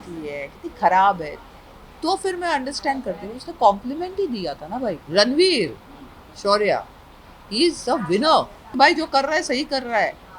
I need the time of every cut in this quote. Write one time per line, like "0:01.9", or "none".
0:05.0
0:08.7

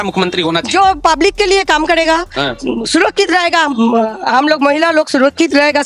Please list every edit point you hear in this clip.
none

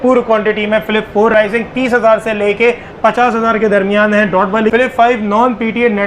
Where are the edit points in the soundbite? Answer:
0:01.3
0:04.7

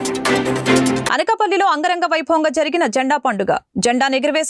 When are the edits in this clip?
none

